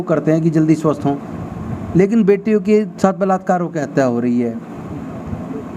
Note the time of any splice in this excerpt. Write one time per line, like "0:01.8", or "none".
none